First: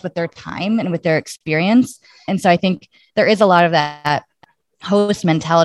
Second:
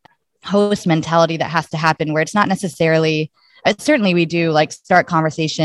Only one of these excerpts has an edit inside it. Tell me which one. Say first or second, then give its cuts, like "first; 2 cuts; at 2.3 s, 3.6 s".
first; 1 cut; at 2.2 s